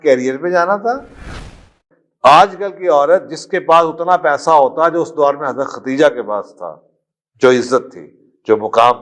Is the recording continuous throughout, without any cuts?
no; 1 cut; at 1.7 s

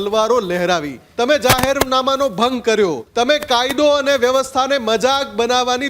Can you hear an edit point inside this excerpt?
yes; 2 cuts; at 1.0 s, 3.0 s

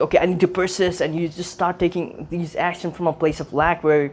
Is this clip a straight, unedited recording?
yes; 0 cuts

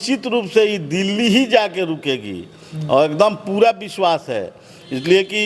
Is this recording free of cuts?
yes; 0 cuts

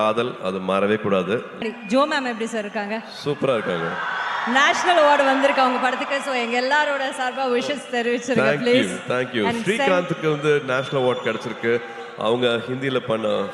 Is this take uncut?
no; 1 cut; at 1.6 s

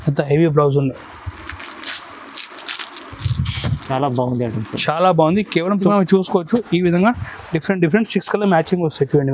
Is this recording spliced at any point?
yes; 1 cut; at 5.9 s

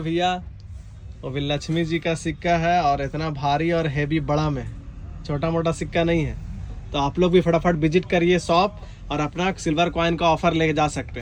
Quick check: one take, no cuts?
yes; 0 cuts

